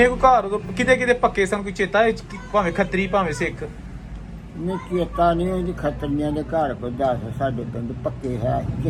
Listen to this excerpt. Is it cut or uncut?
uncut